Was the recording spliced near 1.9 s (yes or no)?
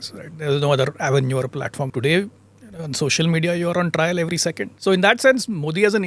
yes